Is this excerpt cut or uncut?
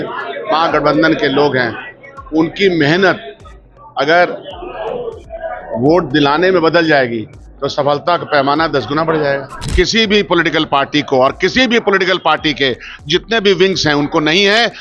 cut